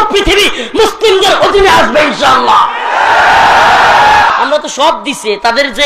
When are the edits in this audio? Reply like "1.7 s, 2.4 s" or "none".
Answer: 4.3 s